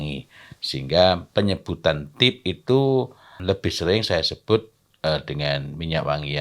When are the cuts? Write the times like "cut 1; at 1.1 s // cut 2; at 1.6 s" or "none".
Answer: cut 1; at 3.3 s